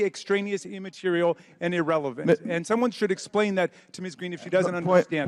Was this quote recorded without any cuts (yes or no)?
yes